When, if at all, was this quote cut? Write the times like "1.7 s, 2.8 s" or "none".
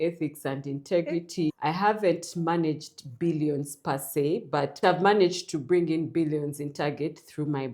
4.7 s